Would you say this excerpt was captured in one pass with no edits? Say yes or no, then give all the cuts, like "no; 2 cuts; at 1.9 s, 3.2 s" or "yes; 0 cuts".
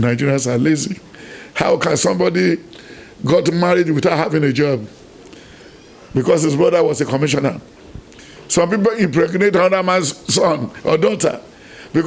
yes; 0 cuts